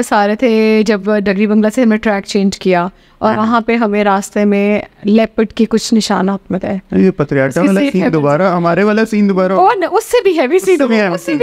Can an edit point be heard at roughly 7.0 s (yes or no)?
no